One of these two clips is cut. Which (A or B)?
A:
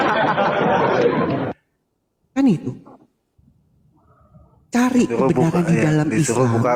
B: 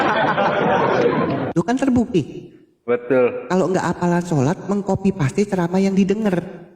B